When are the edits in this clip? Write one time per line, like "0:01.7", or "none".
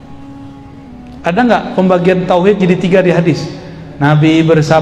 none